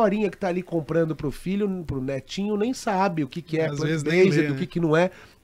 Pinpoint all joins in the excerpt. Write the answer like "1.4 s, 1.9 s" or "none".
none